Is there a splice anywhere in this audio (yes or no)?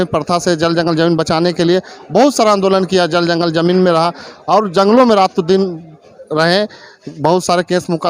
no